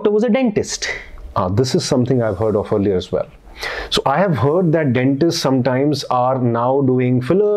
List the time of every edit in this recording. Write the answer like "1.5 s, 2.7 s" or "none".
none